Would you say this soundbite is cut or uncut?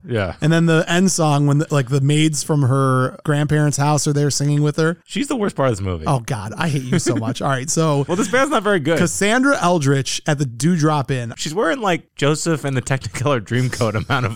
cut